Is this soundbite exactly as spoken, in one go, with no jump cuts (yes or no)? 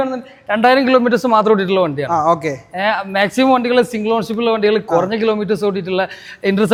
yes